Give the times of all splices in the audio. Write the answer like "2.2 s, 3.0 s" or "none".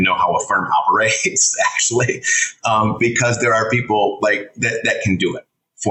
none